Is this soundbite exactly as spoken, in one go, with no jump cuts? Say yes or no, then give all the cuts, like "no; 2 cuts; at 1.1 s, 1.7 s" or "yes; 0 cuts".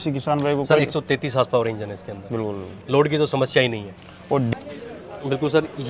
no; 1 cut; at 4.5 s